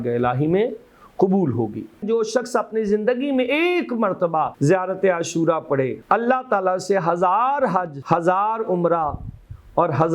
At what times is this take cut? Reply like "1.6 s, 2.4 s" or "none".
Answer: 2.0 s, 4.5 s, 6.0 s, 8.0 s